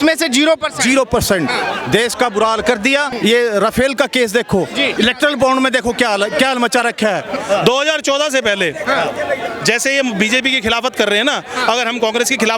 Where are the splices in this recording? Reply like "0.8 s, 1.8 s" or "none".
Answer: 3.1 s, 4.9 s, 7.4 s